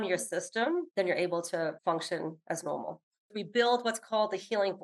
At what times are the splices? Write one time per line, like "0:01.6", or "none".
0:00.9
0:01.9
0:03.3